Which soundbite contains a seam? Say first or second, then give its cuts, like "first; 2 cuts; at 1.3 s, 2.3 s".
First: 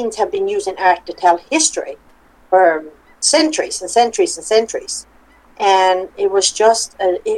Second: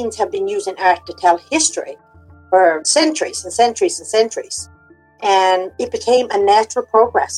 second; 2 cuts; at 2.8 s, 5.7 s